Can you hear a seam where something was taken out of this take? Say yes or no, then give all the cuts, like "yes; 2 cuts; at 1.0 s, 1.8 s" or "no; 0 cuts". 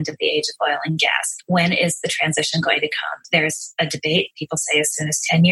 yes; 2 cuts; at 1.3 s, 3.2 s